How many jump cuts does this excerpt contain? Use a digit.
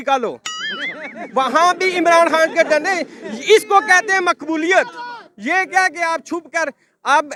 0